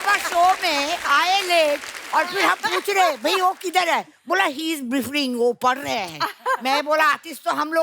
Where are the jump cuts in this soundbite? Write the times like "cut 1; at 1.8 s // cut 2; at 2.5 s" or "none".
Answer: none